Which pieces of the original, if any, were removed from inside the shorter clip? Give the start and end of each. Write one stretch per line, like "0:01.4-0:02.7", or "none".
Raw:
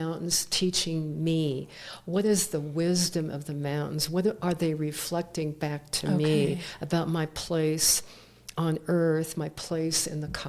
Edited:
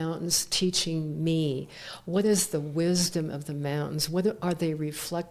none